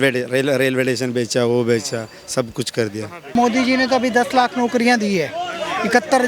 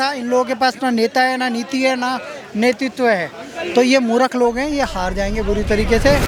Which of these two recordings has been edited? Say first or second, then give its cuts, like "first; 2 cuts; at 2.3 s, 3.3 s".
first; 1 cut; at 3.3 s